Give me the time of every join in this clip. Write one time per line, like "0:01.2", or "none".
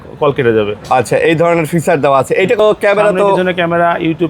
0:02.6